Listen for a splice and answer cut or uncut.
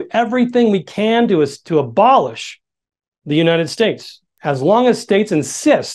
cut